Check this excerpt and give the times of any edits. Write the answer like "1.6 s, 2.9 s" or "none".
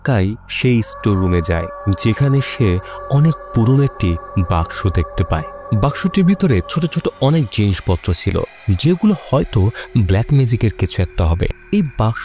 5.6 s